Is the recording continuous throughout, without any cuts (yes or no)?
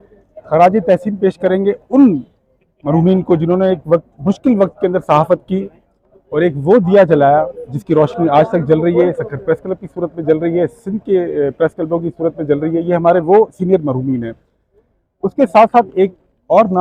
yes